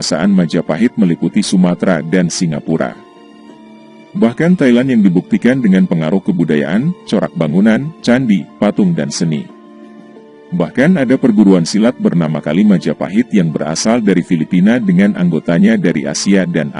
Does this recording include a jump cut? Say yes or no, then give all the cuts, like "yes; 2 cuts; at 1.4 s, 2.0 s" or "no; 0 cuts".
no; 0 cuts